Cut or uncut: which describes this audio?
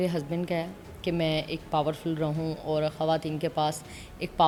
uncut